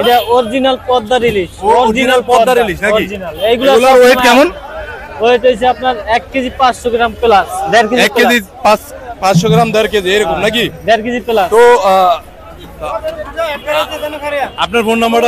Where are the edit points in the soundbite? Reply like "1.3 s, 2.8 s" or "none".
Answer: 12.7 s